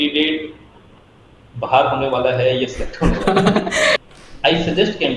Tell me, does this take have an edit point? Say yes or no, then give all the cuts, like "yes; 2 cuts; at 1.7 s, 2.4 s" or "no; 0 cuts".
yes; 1 cut; at 4.0 s